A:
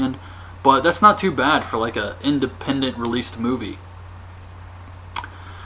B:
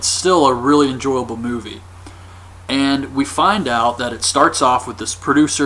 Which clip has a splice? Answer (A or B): A